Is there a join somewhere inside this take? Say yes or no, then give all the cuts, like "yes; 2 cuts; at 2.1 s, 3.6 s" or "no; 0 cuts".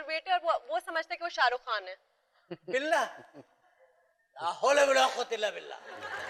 no; 0 cuts